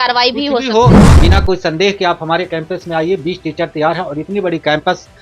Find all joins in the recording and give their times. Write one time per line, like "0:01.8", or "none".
0:01.1